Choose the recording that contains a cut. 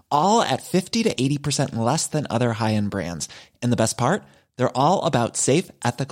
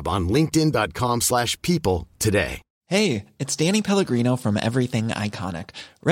second; 1 cut; at 2.7 s

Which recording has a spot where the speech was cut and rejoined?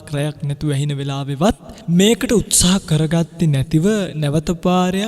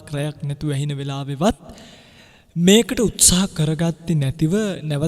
first; 1 cut; at 1.7 s

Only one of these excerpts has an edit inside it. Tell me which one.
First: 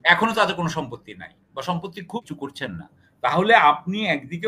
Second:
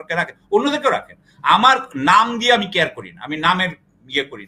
first; 1 cut; at 2.2 s

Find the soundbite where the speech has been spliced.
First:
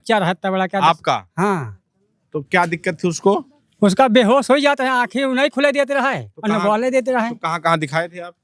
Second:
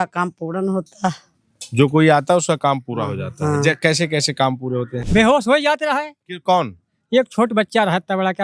second; 1 cut; at 5.0 s

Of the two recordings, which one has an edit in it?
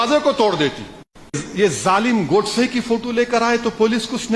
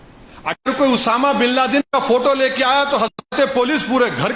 first; 1 cut; at 1.4 s

